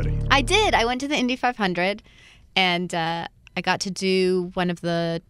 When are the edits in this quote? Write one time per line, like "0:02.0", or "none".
none